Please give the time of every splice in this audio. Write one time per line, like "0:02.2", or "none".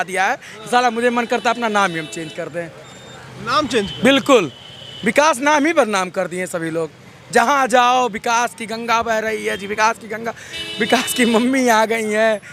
none